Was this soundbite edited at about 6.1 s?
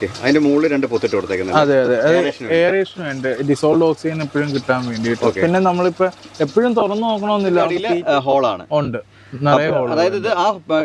no; 1 cut; at 7.8 s

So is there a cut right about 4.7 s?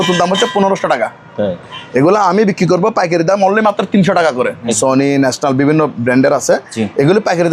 yes; 1 cut; at 4.7 s

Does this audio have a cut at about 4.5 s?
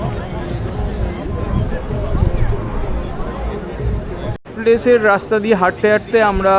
no; 0 cuts

